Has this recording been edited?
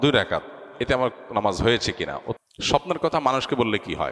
yes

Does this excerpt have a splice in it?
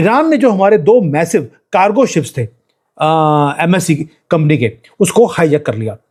no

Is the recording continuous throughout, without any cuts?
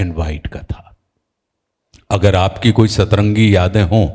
yes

